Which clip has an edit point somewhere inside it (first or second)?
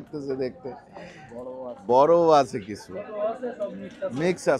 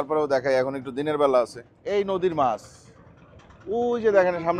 second